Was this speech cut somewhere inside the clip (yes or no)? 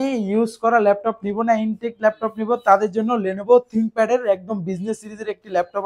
no